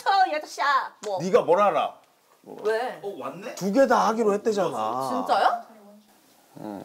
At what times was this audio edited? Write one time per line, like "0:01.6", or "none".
0:00.9